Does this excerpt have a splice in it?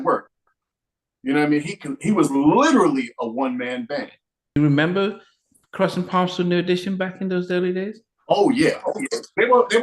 yes; 1 cut; at 4.6 s

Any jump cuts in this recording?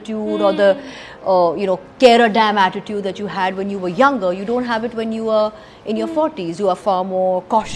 yes; 1 cut; at 6.8 s

